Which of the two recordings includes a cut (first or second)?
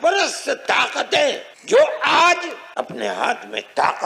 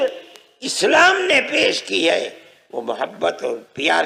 first